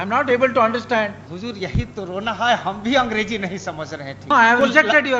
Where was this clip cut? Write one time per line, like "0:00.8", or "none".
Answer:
0:01.3
0:04.3